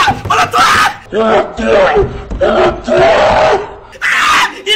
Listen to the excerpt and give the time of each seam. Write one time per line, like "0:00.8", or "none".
0:01.0